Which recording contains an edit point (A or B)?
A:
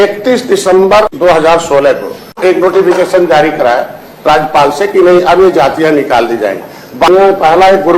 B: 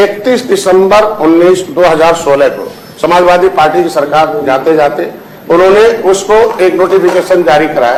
A